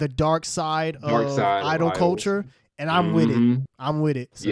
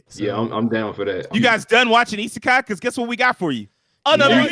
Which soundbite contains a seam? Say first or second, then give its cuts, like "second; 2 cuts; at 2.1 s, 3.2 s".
second; 1 cut; at 1.3 s